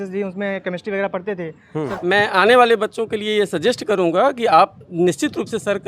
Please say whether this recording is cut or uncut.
cut